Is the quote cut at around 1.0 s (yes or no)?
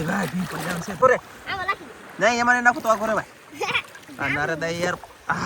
yes